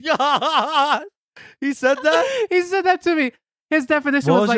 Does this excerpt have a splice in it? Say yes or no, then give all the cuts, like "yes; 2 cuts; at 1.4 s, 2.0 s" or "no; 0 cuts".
no; 0 cuts